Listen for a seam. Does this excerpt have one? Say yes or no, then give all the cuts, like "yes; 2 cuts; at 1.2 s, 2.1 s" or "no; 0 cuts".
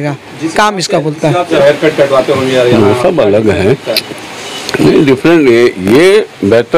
yes; 1 cut; at 1.5 s